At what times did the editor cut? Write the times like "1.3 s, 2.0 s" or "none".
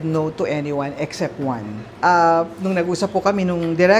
none